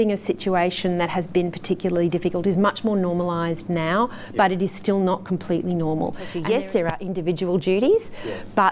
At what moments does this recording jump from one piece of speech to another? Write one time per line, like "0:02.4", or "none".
0:06.3